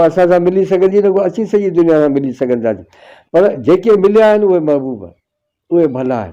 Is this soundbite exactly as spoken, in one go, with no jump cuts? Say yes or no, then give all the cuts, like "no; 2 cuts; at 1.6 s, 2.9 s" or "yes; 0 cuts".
yes; 0 cuts